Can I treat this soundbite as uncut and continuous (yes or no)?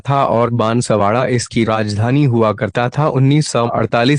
no